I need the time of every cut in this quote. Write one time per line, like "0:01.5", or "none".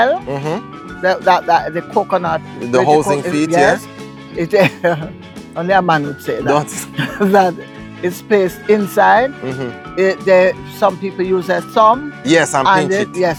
none